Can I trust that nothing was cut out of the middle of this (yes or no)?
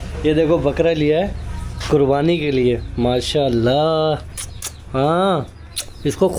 yes